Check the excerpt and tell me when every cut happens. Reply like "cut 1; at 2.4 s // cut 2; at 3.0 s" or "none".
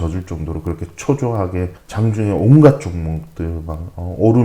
cut 1; at 1.8 s